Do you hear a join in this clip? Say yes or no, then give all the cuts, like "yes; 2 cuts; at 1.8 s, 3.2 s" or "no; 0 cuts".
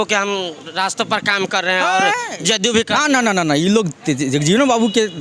no; 0 cuts